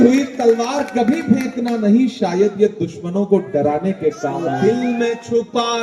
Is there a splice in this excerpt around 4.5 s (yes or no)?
yes